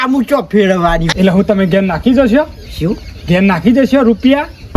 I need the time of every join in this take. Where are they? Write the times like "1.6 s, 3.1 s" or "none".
1.1 s